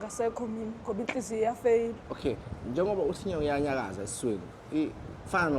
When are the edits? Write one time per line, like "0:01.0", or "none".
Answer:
0:02.1

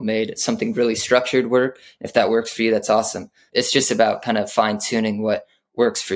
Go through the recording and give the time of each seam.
0:03.4

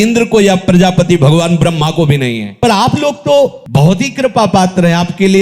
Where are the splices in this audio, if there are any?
0:02.5

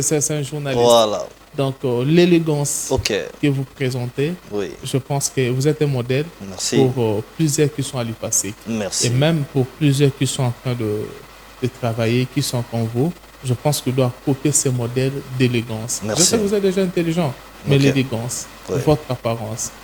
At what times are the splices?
none

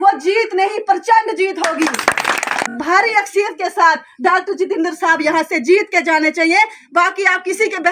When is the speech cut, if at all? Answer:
0:02.7

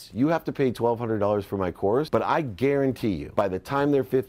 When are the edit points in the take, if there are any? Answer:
0:02.1
0:03.2

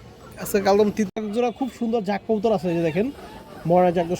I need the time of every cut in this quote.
0:01.1

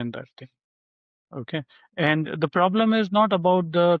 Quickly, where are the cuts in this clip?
none

